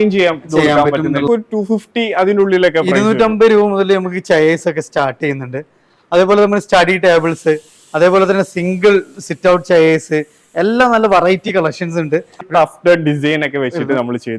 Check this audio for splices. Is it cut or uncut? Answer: cut